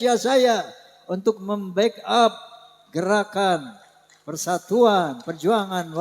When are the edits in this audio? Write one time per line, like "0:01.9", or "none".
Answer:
none